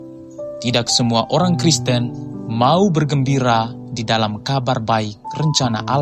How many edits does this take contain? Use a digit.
0